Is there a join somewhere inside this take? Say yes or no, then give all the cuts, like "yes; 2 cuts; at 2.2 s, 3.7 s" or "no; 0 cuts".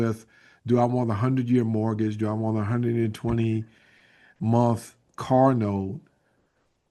no; 0 cuts